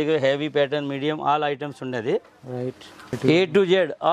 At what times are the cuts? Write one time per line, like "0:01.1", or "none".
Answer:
0:03.2